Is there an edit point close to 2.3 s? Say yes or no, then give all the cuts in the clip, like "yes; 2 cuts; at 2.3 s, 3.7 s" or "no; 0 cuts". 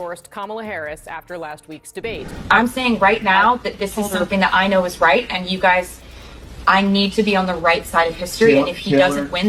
yes; 1 cut; at 2.3 s